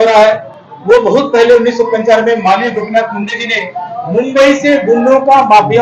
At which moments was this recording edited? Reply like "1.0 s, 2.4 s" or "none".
none